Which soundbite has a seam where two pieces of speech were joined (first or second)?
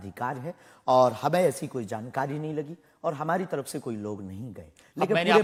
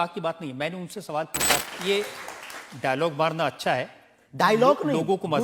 second